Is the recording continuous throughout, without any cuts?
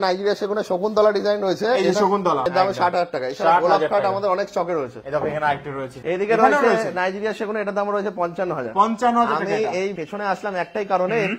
yes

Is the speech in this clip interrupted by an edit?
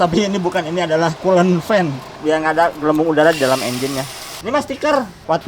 yes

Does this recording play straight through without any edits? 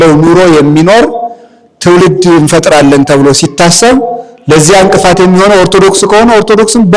yes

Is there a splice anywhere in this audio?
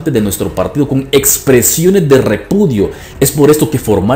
yes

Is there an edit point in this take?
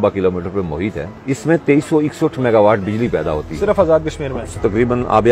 yes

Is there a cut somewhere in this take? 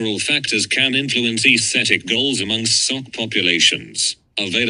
no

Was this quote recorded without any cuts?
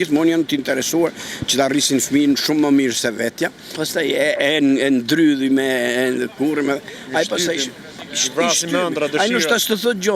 no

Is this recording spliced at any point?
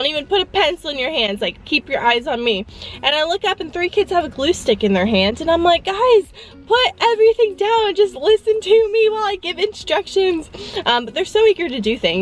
no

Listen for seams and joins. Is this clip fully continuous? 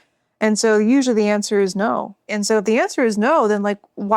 no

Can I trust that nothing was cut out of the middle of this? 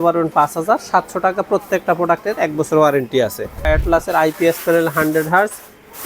no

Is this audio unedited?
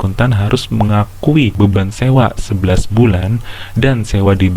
no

